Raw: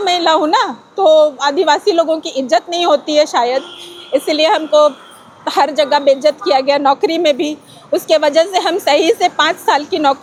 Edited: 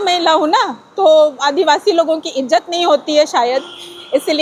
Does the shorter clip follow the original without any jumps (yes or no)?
yes